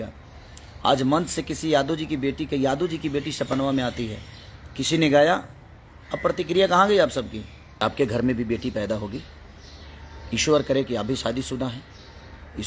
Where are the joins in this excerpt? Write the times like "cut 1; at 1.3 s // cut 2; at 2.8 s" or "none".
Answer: cut 1; at 7.8 s